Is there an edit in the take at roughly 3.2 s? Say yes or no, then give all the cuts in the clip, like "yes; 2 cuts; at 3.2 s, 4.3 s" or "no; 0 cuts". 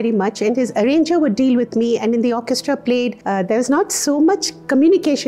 yes; 1 cut; at 3.2 s